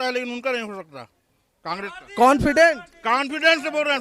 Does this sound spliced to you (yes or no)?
no